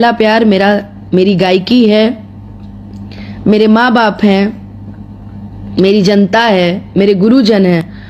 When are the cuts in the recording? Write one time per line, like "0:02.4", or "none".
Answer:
none